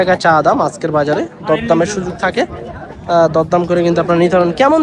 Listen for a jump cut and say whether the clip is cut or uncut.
uncut